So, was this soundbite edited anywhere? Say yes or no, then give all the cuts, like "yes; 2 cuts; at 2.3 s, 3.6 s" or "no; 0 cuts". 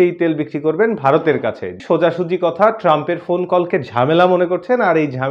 yes; 1 cut; at 1.8 s